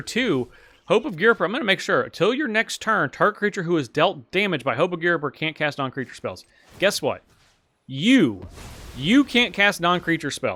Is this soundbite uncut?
yes; 0 cuts

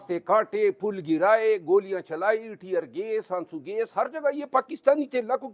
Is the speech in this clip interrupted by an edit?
no; 0 cuts

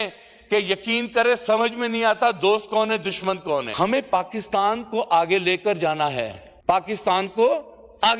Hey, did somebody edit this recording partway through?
no; 0 cuts

